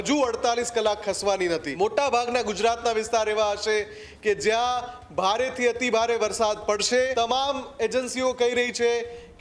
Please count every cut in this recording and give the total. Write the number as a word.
two